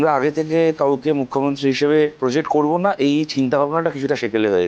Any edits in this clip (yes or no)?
yes